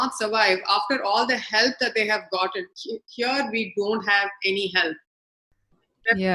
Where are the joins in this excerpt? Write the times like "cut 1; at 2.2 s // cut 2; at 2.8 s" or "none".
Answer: none